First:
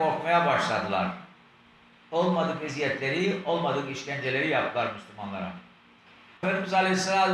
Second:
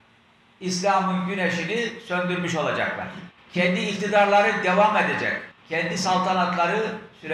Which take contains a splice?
first; 1 cut; at 6.4 s

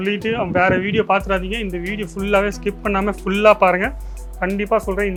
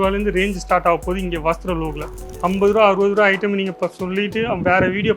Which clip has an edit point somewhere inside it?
second; 1 cut; at 2.2 s

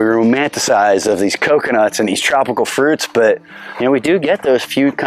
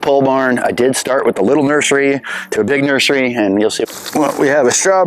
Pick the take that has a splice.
second; 1 cut; at 3.8 s

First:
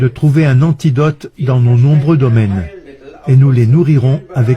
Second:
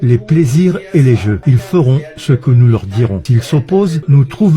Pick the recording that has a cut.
second; 2 cuts; at 1.4 s, 2.9 s

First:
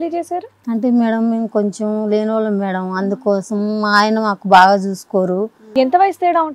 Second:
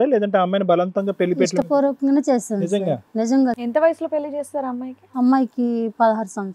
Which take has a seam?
first; 1 cut; at 5.7 s

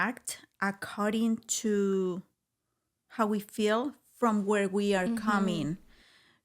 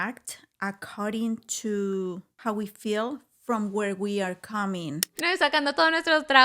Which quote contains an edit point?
second; 2 cuts; at 2.3 s, 5.1 s

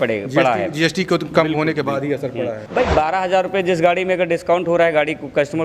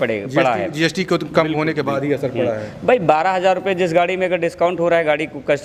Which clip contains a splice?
first; 1 cut; at 2.6 s

